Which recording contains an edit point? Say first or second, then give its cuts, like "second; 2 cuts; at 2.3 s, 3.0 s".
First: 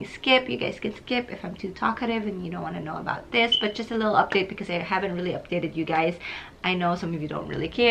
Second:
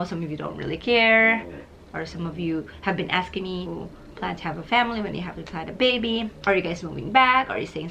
second; 2 cuts; at 3.7 s, 6.3 s